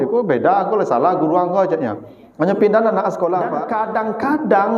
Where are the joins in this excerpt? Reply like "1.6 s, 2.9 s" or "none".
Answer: 3.6 s